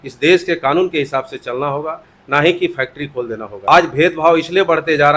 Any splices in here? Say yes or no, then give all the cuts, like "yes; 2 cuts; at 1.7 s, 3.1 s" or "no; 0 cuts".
yes; 1 cut; at 3.4 s